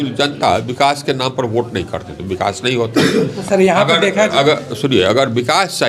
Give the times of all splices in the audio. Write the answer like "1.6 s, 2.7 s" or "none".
none